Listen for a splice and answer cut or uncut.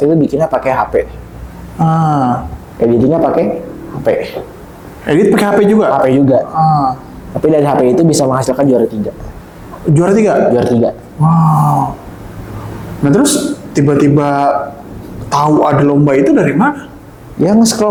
uncut